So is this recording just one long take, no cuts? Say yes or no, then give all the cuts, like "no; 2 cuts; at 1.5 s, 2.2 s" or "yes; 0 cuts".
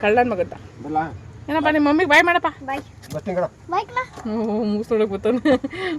yes; 0 cuts